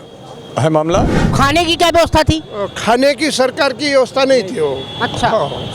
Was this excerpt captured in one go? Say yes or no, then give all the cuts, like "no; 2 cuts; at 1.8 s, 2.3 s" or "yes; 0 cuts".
no; 1 cut; at 1.3 s